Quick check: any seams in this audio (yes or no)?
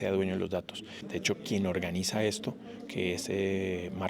yes